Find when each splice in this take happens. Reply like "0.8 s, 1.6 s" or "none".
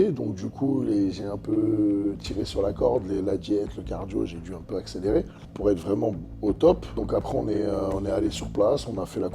5.4 s, 6.9 s